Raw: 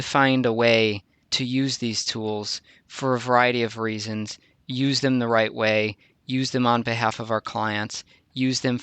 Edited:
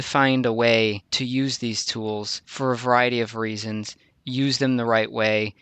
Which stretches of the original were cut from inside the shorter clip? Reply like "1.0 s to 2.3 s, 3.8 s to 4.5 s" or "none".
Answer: 1.1 s to 1.3 s, 2.6 s to 2.8 s